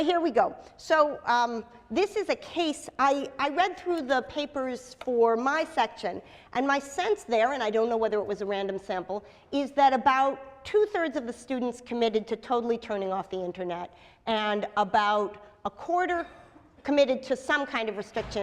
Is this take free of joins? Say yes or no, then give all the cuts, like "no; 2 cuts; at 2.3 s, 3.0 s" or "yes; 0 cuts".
no; 1 cut; at 1.0 s